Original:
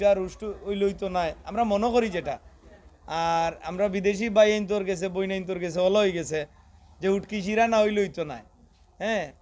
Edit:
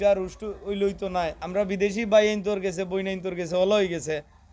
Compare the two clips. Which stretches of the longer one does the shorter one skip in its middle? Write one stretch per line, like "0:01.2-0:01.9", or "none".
0:01.4-0:03.7